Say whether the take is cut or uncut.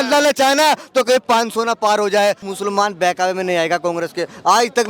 cut